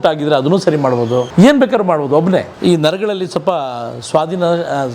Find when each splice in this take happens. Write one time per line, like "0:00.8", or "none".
0:01.3
0:02.5

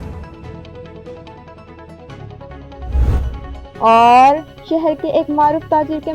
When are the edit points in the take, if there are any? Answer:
0:03.5

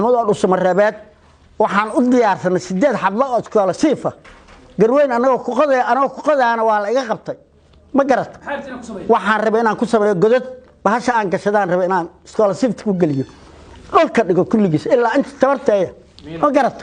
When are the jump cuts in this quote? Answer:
none

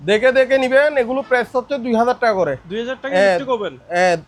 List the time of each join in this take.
none

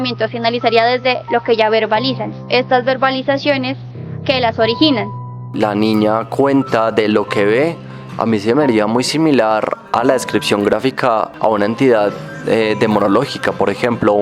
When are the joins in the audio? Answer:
0:05.4
0:11.3

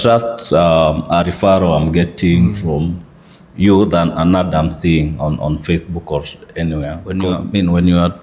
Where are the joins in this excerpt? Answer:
0:07.2

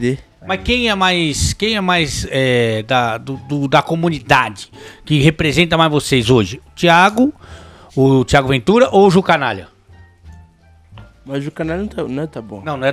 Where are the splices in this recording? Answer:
none

